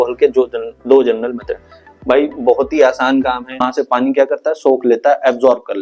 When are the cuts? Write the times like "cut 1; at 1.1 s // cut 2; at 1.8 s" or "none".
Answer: cut 1; at 3.6 s